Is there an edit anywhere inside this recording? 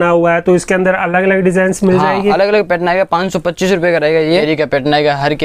yes; 1 cut; at 4.3 s

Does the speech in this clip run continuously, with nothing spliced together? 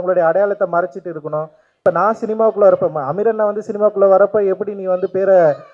no; 1 cut; at 1.7 s

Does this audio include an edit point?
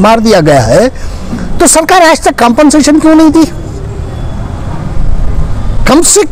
no; 0 cuts

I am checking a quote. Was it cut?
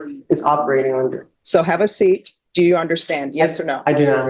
yes; 2 cuts; at 1.3 s, 2.4 s

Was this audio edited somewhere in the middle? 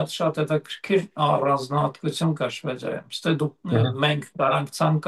no; 0 cuts

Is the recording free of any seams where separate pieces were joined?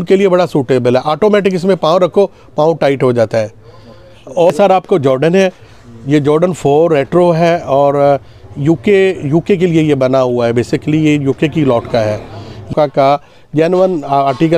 no; 2 cuts; at 4.5 s, 12.7 s

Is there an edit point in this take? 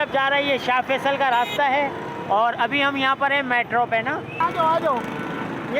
yes; 1 cut; at 4.4 s

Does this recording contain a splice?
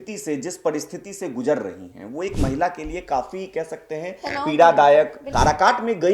yes; 1 cut; at 5.2 s

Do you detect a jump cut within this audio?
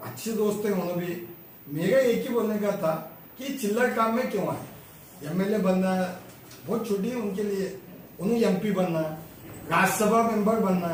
no; 0 cuts

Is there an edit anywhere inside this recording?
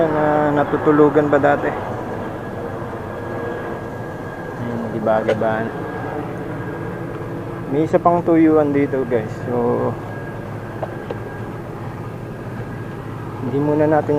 no; 0 cuts

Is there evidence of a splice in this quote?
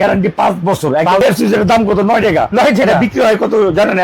yes; 1 cut; at 1.2 s

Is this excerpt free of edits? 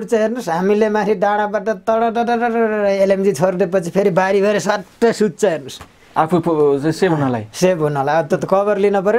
yes; 0 cuts

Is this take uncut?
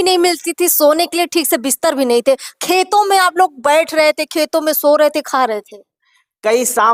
yes; 0 cuts

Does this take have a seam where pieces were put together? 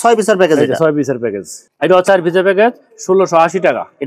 yes; 1 cut; at 1.7 s

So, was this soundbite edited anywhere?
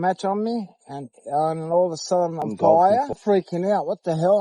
yes; 2 cuts; at 2.4 s, 3.2 s

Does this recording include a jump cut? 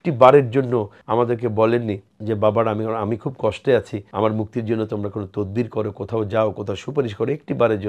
yes; 3 cuts; at 1.0 s, 2.1 s, 4.0 s

